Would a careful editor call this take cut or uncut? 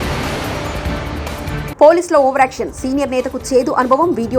cut